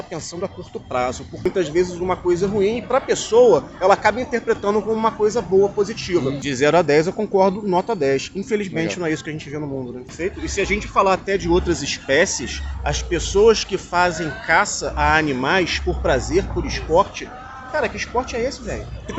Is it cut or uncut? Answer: cut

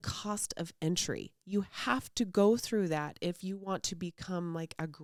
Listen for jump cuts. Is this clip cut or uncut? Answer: uncut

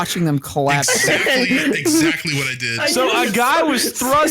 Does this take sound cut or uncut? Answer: cut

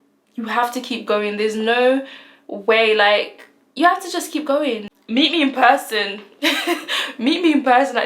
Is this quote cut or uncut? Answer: cut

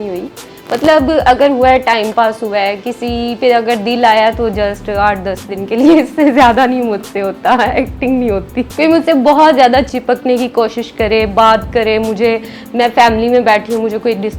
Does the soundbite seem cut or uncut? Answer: uncut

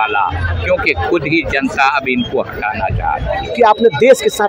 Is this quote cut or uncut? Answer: cut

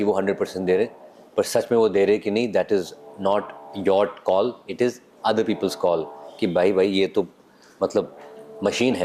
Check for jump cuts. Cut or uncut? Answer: uncut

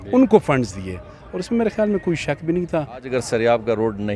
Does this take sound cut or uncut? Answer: cut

